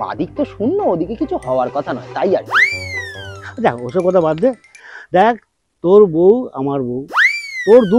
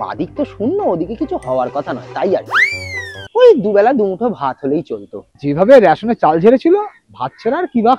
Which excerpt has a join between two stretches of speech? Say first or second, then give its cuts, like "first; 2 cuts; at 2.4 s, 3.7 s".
second; 1 cut; at 3.2 s